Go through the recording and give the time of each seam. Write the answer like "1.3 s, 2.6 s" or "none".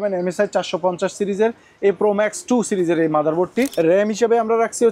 3.7 s